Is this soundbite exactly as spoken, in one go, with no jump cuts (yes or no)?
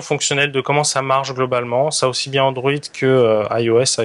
yes